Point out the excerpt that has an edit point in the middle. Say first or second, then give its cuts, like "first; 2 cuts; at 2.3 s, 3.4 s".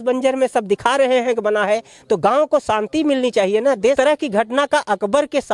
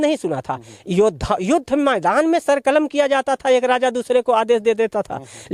first; 1 cut; at 3.9 s